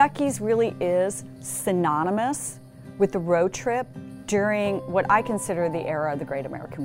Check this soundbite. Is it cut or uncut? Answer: uncut